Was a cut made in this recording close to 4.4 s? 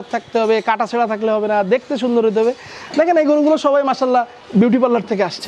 yes; 1 cut; at 4.4 s

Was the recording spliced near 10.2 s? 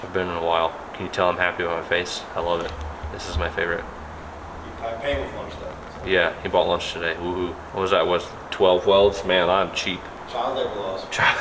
yes; 3 cuts; at 0.9 s, 7.6 s, 10.2 s

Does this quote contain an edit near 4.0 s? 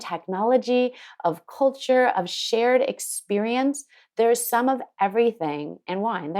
no; 0 cuts

